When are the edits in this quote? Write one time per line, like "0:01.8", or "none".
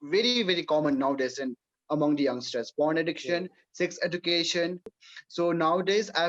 0:04.9